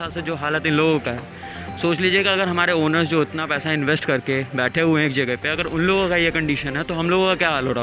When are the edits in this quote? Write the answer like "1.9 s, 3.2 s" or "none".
none